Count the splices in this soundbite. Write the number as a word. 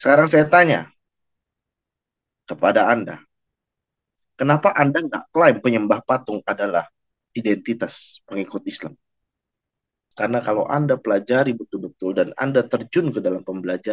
one